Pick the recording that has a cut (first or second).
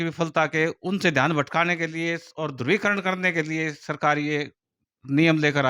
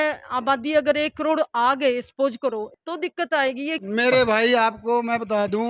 second